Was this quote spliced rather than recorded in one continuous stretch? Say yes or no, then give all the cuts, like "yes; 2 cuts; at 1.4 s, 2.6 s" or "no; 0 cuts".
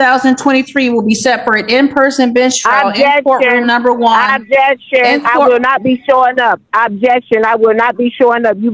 no; 0 cuts